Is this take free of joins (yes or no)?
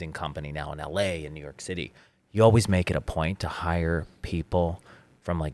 yes